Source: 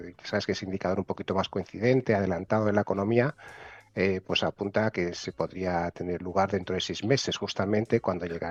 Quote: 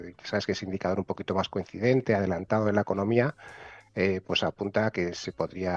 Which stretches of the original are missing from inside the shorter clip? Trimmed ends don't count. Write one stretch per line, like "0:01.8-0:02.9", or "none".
none